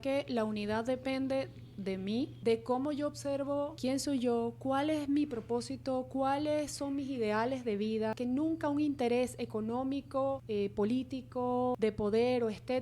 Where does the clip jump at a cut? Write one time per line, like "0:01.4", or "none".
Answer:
0:02.4
0:03.7
0:08.2
0:10.4
0:11.8